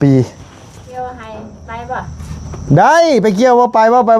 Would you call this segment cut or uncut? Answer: cut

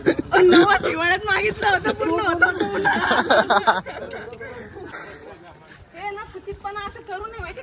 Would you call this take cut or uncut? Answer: cut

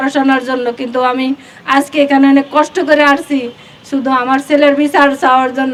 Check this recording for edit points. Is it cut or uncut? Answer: uncut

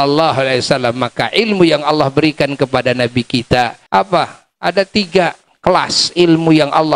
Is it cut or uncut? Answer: cut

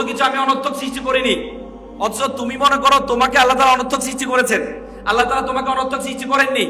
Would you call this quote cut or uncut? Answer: uncut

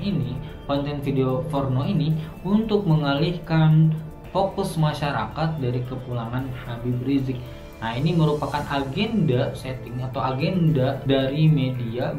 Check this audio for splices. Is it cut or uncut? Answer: uncut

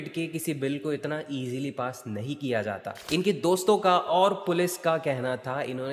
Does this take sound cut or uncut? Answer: cut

